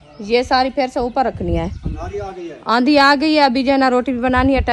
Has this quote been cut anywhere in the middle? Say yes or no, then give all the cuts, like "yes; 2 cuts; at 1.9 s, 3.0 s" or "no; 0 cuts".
no; 0 cuts